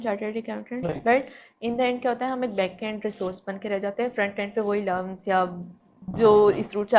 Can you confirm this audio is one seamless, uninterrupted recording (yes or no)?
yes